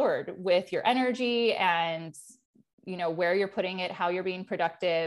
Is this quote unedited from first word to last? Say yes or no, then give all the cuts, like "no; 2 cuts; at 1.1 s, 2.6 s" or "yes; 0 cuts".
yes; 0 cuts